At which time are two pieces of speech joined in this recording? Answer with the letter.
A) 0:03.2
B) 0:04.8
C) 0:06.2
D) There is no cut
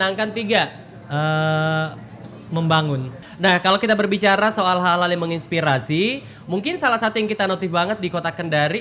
A